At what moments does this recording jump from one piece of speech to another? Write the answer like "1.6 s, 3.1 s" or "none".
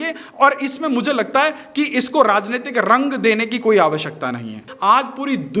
4.7 s